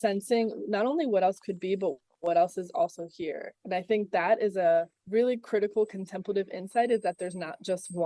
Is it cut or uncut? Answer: cut